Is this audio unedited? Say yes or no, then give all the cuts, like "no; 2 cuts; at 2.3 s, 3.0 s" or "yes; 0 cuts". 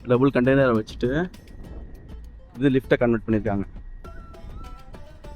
yes; 0 cuts